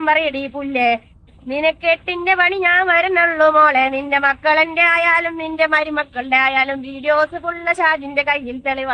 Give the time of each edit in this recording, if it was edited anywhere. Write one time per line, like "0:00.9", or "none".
none